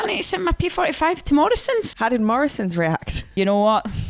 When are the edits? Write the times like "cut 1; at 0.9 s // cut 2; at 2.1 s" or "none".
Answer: cut 1; at 1.9 s // cut 2; at 3.2 s

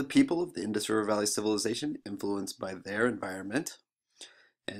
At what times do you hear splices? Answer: cut 1; at 1.1 s

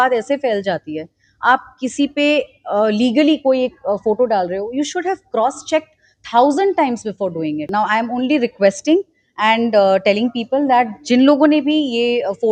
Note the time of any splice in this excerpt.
cut 1; at 7.7 s

